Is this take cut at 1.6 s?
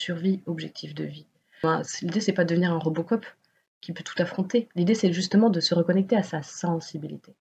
yes; 1 cut; at 1.6 s

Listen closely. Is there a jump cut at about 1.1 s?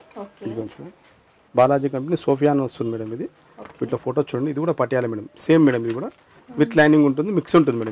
yes; 1 cut; at 1.1 s

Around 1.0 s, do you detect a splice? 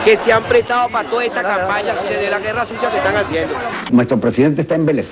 no; 1 cut; at 3.8 s

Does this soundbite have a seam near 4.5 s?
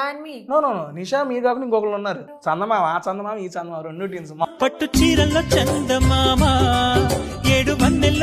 yes; 2 cuts; at 2.3 s, 4.5 s

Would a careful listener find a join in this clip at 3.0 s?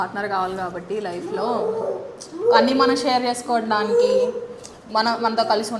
no; 0 cuts

